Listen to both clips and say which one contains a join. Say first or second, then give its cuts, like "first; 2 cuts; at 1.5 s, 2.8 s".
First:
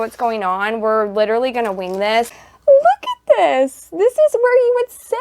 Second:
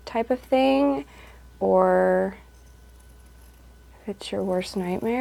first; 1 cut; at 2.4 s